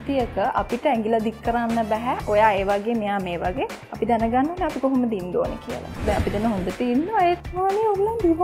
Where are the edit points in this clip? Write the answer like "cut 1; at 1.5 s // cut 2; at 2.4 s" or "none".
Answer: cut 1; at 6.0 s // cut 2; at 7.4 s